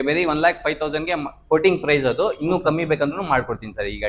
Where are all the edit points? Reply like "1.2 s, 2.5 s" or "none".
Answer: none